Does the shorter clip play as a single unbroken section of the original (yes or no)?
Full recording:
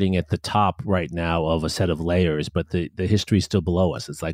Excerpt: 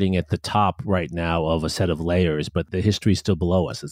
no